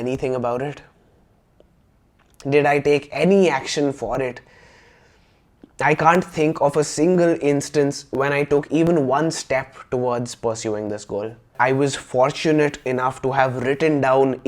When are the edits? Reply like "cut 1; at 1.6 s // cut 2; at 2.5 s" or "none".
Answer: cut 1; at 11.5 s